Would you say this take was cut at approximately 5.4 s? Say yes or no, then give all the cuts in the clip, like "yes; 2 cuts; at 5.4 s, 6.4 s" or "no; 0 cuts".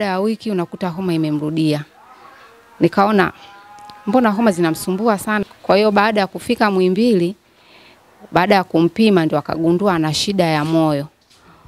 yes; 1 cut; at 5.4 s